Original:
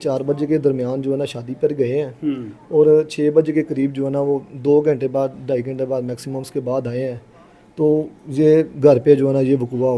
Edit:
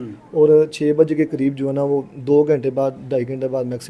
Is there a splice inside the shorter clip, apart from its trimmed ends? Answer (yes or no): no